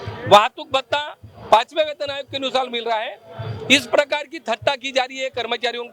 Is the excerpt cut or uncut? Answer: uncut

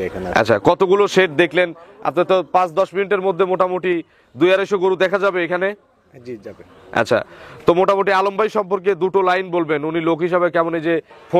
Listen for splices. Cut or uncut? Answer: uncut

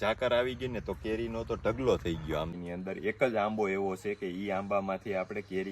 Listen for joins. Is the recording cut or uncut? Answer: cut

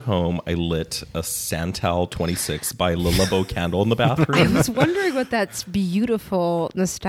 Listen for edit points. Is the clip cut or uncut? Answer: uncut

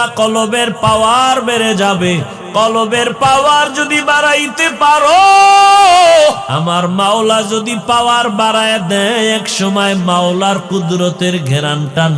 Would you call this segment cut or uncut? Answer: cut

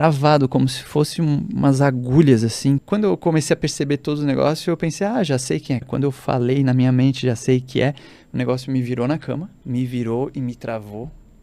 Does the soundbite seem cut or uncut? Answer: cut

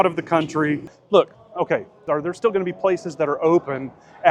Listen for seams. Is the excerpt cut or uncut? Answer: cut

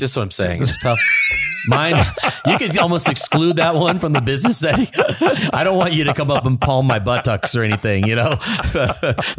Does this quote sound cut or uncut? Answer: uncut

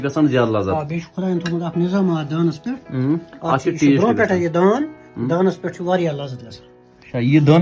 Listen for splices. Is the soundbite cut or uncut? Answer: cut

